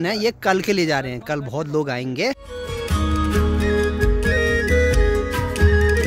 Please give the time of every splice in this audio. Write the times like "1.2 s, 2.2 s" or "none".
none